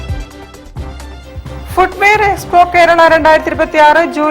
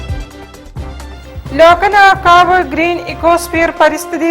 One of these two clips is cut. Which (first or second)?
second